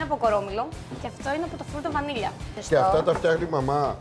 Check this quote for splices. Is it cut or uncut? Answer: cut